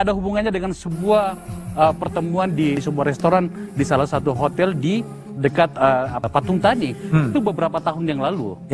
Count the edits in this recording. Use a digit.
2